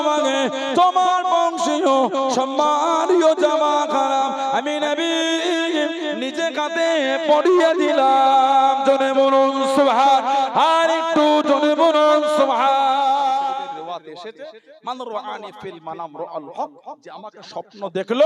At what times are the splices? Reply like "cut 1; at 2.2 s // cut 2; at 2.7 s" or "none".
cut 1; at 13.7 s